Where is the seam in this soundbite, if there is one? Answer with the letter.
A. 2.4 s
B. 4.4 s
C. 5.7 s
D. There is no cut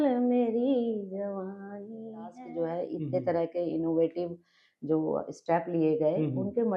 A